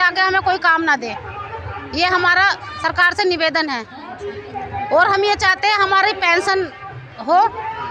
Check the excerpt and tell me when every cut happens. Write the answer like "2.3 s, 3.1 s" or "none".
none